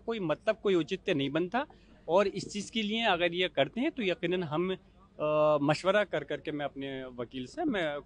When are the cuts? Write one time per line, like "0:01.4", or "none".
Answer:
none